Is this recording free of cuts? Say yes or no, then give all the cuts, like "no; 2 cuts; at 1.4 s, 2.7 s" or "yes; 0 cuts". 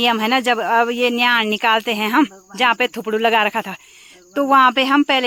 yes; 0 cuts